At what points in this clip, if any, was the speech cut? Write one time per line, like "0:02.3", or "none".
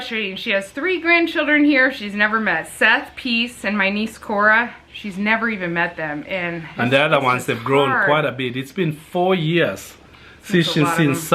none

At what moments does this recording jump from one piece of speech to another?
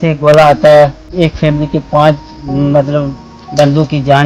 0:01.1

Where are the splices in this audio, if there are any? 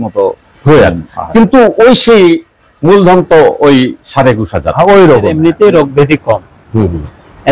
0:05.4

